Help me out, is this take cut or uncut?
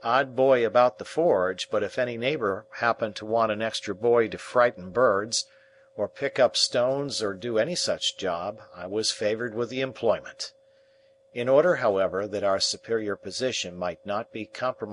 cut